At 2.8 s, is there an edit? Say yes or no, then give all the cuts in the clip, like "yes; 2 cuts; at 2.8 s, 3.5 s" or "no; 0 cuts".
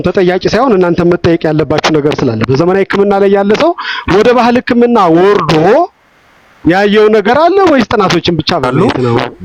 no; 0 cuts